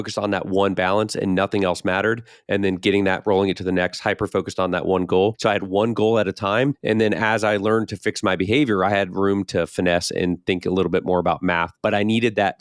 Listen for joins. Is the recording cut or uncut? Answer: cut